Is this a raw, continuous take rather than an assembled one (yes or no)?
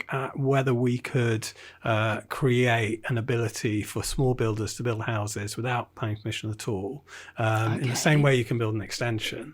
yes